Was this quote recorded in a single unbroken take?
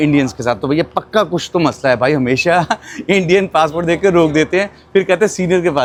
yes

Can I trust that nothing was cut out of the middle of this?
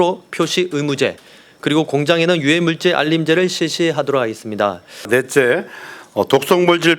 no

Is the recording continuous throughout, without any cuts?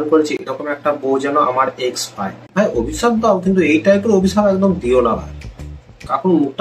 yes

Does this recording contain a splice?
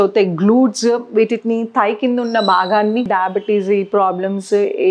yes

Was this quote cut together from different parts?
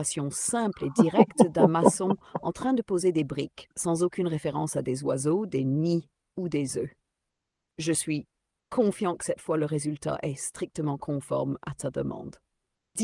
no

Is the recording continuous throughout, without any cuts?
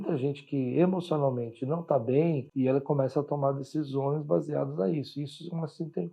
no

